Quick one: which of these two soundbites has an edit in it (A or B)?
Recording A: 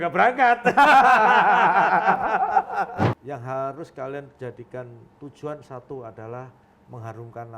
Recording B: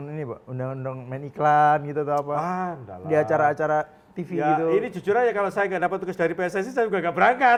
A